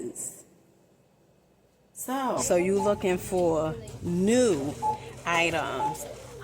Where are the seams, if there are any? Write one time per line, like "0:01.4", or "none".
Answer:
0:02.4